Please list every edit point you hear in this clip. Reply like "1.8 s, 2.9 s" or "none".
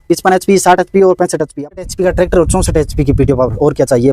1.5 s